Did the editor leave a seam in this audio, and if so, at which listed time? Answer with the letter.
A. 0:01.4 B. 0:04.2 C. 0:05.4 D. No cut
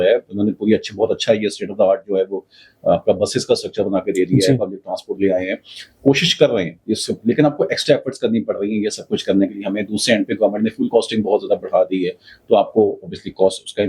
D